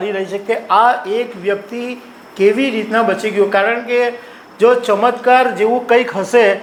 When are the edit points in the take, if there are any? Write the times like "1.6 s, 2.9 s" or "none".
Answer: none